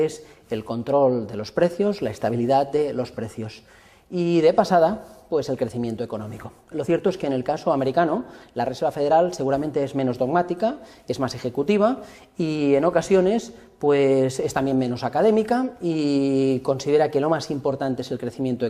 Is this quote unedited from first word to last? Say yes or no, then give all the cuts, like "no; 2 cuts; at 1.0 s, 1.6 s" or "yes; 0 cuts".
yes; 0 cuts